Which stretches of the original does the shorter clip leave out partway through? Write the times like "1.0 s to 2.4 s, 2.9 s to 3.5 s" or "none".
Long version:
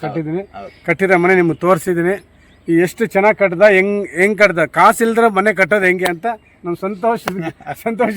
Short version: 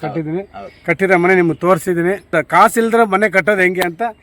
2.3 s to 4.5 s